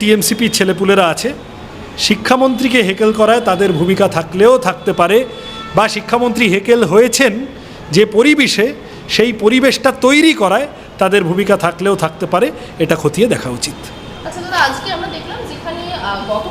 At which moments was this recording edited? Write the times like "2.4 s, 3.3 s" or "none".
none